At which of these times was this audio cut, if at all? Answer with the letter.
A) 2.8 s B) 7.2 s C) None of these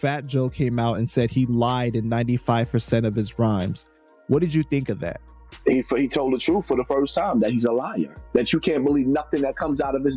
C